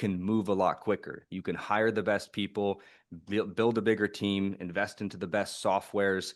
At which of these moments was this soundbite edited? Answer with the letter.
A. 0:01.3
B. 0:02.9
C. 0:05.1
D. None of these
D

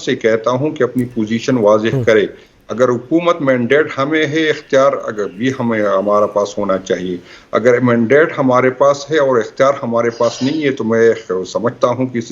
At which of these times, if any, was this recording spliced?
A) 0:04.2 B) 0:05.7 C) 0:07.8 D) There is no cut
D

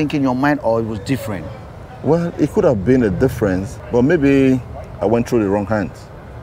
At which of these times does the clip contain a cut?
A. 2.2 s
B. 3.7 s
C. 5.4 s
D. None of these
B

